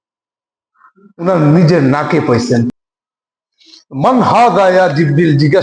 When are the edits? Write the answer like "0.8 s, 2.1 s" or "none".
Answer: 2.7 s